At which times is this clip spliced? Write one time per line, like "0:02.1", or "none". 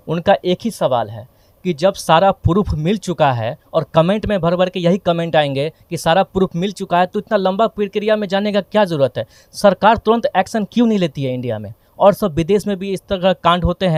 none